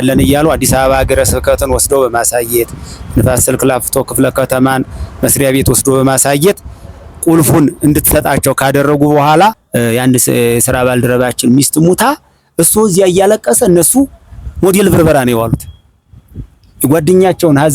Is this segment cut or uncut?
cut